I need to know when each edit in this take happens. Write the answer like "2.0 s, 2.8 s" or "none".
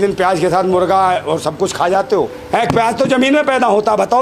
2.4 s